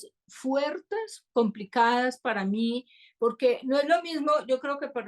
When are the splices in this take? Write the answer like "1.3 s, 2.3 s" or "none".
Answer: 1.2 s